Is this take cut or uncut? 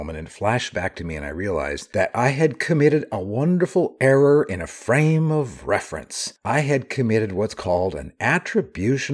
uncut